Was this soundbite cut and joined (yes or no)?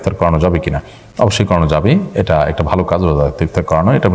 no